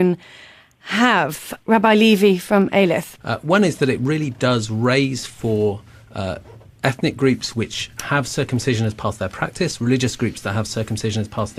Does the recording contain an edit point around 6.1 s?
yes; 1 cut; at 6.1 s

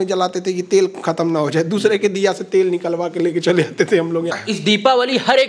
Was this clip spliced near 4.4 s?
yes; 1 cut; at 4.4 s

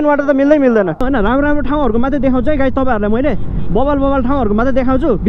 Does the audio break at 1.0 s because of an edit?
yes; 1 cut; at 1.0 s

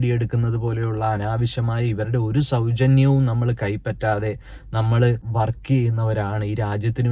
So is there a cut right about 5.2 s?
yes; 1 cut; at 5.2 s

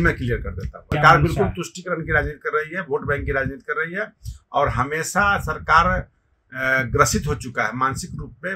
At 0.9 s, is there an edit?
yes; 1 cut; at 0.9 s

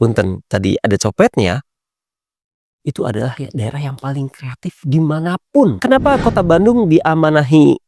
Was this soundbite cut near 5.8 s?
yes; 1 cut; at 5.8 s

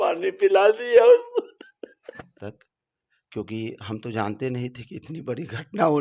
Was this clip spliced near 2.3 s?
yes; 1 cut; at 2.3 s

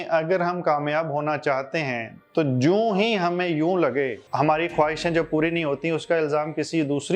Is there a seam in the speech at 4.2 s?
yes; 1 cut; at 4.2 s

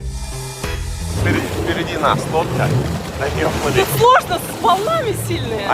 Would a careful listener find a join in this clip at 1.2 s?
yes; 1 cut; at 1.2 s

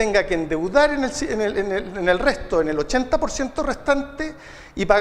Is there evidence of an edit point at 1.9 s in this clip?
yes; 1 cut; at 1.9 s

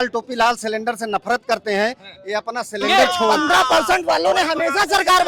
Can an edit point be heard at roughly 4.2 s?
no; 1 cut; at 2.9 s

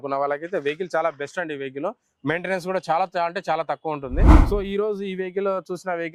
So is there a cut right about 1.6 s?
no; 1 cut; at 4.4 s

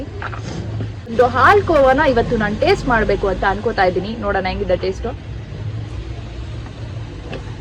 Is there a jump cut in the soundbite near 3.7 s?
no; 1 cut; at 1.1 s

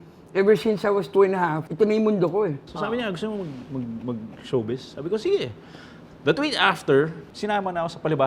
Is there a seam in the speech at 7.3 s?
yes; 3 cuts; at 1.6 s, 2.7 s, 7.3 s

